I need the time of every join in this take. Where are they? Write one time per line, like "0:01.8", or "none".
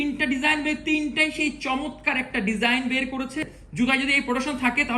0:03.6